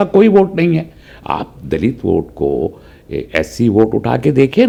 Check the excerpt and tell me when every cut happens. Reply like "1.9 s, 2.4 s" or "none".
none